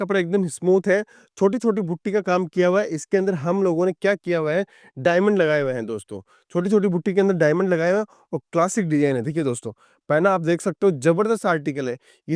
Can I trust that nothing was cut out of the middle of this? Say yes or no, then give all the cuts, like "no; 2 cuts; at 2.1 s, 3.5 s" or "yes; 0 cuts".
yes; 0 cuts